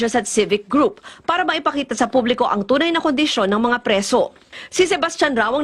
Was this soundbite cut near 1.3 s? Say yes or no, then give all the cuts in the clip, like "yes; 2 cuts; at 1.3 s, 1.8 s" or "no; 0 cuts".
yes; 1 cut; at 1.3 s